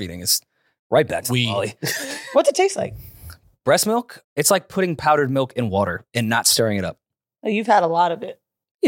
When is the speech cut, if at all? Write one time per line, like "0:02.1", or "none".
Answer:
0:04.2